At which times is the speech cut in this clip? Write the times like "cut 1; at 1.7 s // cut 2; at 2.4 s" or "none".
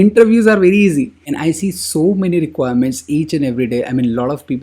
cut 1; at 1.2 s